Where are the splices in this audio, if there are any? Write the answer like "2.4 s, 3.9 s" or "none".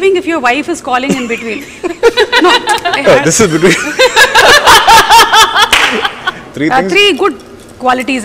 6.5 s